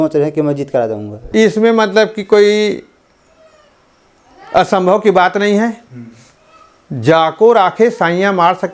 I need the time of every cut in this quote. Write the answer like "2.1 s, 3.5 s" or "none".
none